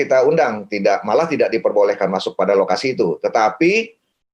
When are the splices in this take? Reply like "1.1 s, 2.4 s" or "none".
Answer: none